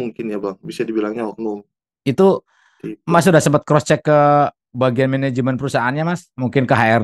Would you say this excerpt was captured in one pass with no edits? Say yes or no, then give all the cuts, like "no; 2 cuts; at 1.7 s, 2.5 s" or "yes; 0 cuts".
yes; 0 cuts